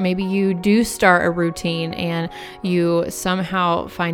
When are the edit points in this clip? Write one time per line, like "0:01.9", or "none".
none